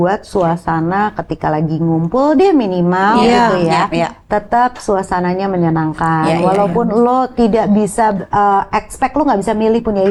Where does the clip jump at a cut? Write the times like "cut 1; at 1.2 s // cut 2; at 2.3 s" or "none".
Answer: none